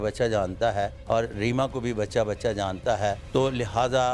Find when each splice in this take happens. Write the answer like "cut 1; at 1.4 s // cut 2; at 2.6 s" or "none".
cut 1; at 1.0 s // cut 2; at 3.2 s